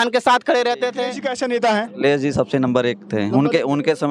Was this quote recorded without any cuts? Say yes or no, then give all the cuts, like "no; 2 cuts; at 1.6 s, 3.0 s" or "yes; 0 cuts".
no; 1 cut; at 1.2 s